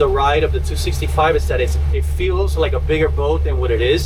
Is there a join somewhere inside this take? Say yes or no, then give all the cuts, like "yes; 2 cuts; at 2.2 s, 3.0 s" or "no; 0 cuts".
no; 0 cuts